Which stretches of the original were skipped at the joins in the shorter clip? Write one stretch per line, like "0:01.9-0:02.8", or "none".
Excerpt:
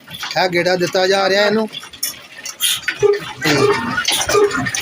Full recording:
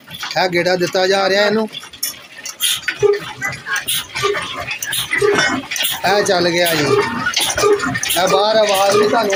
0:03.4-0:06.7

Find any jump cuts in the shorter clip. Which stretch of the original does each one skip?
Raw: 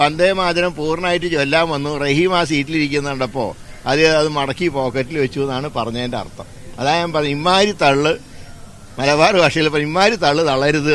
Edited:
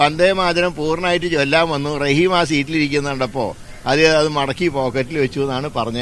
none

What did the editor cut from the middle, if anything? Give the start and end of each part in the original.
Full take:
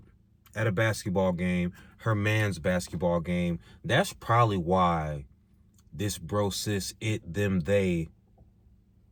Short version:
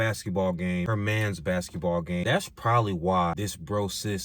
0:01.7-0:02.1
0:03.4-0:03.9
0:05.0-0:06.0

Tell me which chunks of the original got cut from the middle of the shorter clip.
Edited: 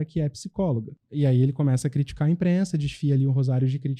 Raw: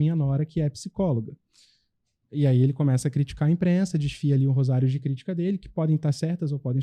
0:01.4-0:02.2

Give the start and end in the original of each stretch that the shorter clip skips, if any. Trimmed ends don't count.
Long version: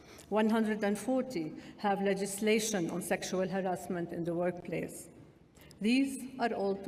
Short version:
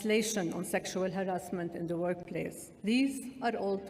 0:05.0-0:05.6

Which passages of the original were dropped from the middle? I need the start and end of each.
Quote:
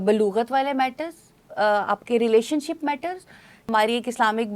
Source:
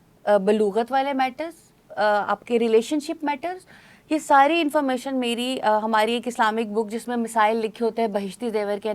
0:04.0-0:05.8

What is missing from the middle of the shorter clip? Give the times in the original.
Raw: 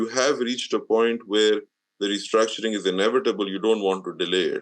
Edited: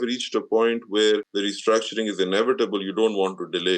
0:01.7-0:02.0

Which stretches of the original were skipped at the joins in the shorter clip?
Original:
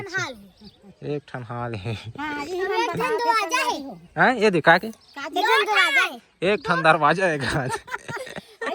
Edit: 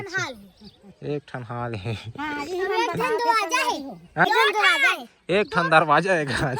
0:04.2-0:05.4

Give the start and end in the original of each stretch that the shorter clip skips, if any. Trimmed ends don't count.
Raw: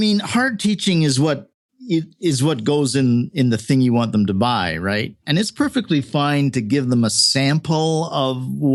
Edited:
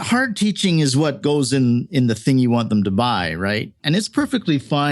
0:01.4-0:02.6

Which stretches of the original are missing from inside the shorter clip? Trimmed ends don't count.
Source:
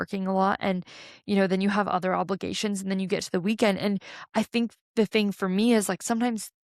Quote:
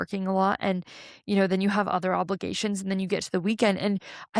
none

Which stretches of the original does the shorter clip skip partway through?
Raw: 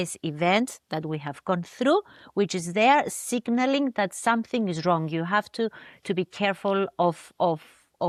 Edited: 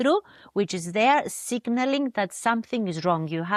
none

